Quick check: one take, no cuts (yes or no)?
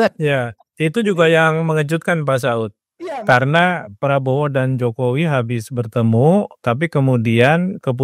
yes